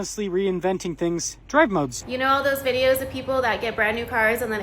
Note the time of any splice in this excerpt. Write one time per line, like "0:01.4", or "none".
0:02.0

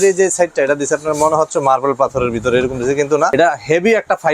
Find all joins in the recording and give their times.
0:03.3

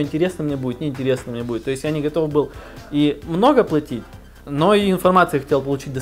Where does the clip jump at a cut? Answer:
none

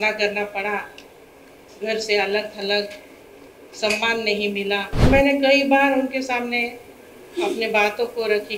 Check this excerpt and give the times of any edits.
0:05.0

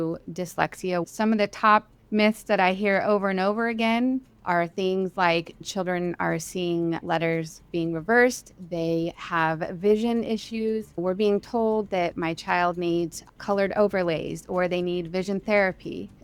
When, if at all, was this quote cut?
0:01.0
0:05.6
0:07.0
0:11.0

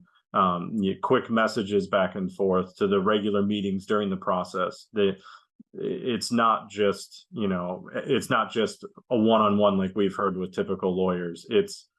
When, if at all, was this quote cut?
none

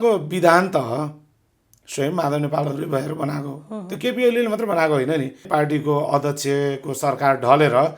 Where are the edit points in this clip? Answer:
0:05.4

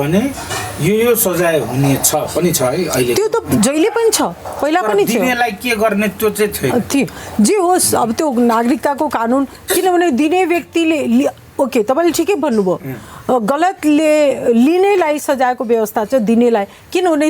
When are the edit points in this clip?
none

